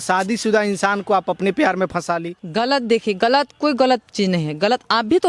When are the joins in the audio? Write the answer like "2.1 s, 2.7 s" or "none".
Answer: 2.4 s